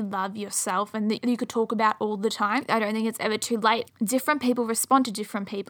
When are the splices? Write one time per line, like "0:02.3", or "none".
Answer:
0:01.2
0:02.7
0:03.9

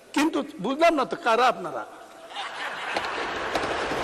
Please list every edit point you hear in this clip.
none

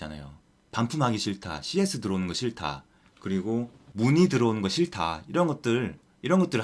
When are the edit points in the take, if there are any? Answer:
none

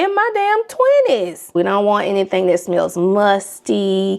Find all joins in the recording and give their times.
0:01.4

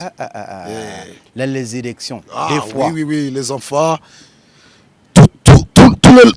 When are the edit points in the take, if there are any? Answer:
none

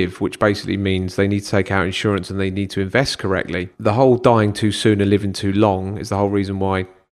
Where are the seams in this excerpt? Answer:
0:03.7

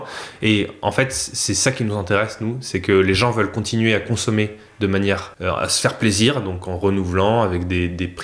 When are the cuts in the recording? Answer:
0:05.3

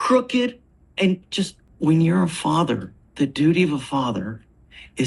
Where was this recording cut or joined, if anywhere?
0:01.6
0:03.0

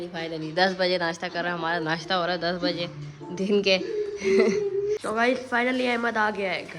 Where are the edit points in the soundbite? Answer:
0:05.0

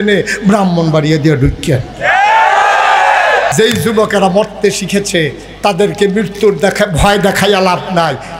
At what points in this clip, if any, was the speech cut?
0:03.5

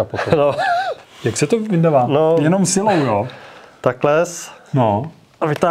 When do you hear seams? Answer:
none

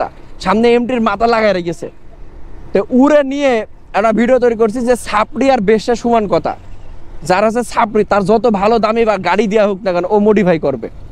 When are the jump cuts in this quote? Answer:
none

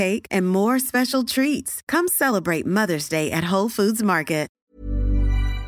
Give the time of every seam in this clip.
0:04.6

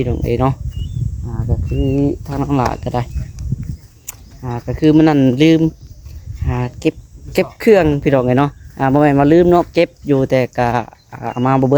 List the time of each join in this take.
none

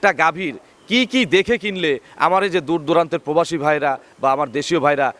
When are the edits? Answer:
none

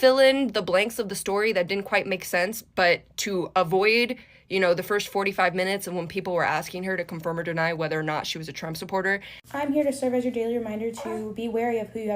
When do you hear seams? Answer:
0:09.4

